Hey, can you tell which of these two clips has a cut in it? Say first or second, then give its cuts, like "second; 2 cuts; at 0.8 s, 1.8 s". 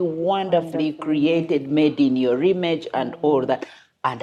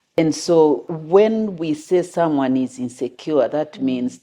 second; 1 cut; at 0.9 s